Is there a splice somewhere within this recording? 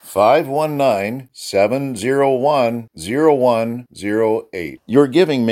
no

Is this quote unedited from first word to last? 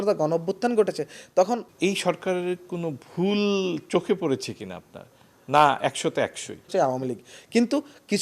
no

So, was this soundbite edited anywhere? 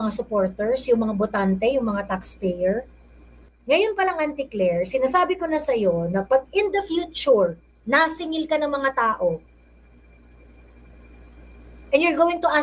yes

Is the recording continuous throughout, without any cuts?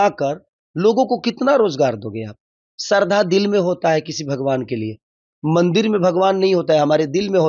yes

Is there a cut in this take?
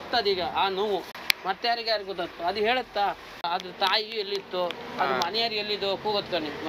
yes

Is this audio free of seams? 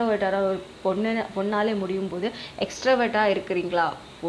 yes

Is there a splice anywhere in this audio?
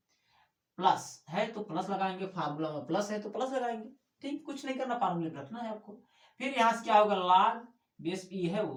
no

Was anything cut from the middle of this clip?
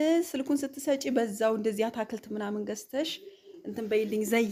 no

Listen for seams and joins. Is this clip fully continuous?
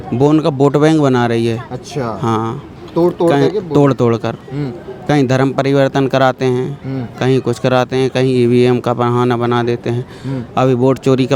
yes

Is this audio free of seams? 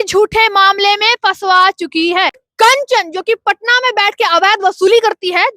no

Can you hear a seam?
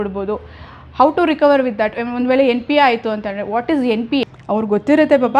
yes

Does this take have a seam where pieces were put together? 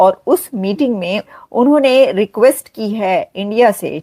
yes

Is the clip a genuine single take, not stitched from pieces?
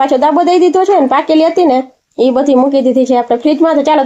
yes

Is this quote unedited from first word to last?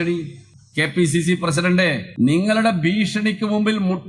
no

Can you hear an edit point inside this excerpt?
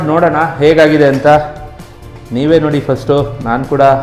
no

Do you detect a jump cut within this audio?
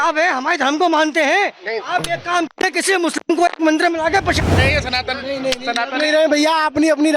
yes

